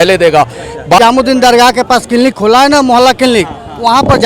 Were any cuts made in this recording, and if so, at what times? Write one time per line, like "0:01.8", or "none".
0:01.0

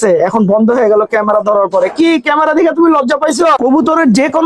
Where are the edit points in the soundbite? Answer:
0:03.6

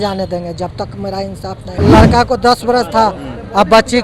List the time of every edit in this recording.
0:01.8

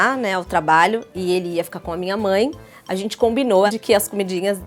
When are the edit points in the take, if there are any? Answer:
0:03.7

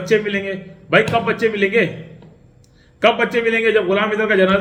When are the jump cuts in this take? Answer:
none

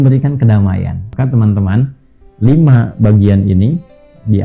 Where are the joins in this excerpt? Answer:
0:01.1

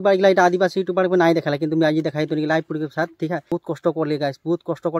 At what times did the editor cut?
0:03.5

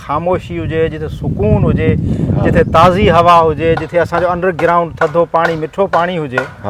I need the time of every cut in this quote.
none

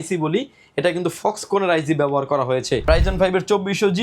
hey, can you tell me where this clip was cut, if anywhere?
0:02.8

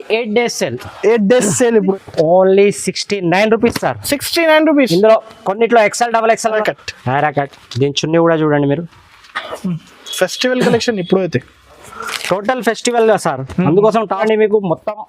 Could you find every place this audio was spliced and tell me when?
0:01.9
0:06.6
0:14.2

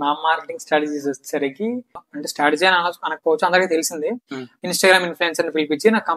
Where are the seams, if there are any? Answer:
0:02.1

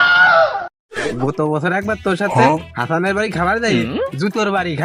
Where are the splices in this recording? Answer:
0:01.0

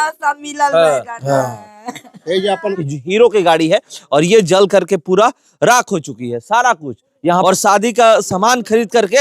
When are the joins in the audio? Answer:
0:02.8
0:07.4

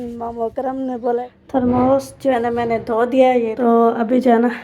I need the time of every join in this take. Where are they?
0:01.1
0:03.5

